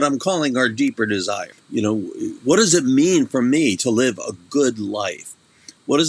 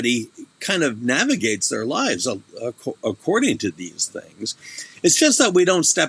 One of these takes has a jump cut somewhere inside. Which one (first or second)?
first